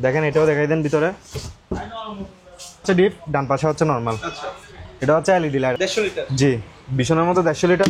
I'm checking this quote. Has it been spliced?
yes; 2 cuts; at 2.8 s, 5.7 s

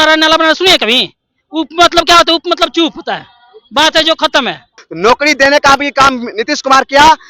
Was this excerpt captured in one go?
no; 1 cut; at 4.8 s

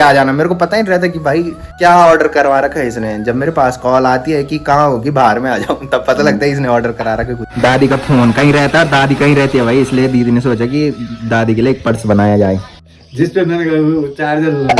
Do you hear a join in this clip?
yes; 3 cuts; at 1.6 s, 7.4 s, 12.8 s

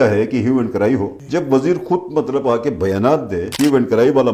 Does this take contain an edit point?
no; 0 cuts

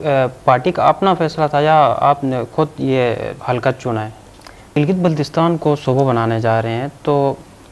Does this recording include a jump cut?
yes; 1 cut; at 4.7 s

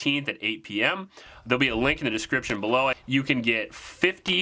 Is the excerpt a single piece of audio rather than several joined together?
no; 1 cut; at 3.0 s

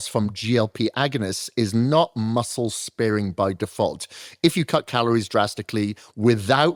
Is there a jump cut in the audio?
no; 0 cuts

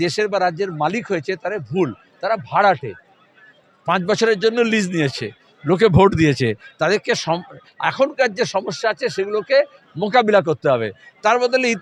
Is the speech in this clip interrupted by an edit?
no; 0 cuts

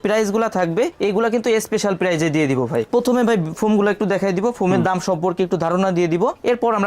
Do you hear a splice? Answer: yes; 1 cut; at 2.9 s

